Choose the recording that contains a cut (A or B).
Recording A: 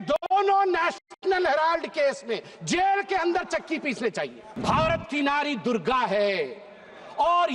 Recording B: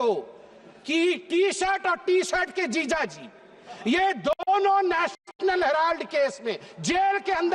A